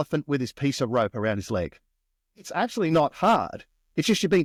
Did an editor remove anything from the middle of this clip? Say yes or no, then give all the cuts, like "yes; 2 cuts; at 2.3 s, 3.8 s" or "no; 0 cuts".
no; 0 cuts